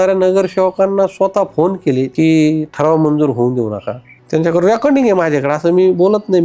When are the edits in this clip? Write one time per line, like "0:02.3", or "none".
0:02.1
0:04.2